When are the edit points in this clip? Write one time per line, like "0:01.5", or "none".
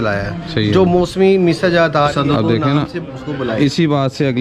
0:02.1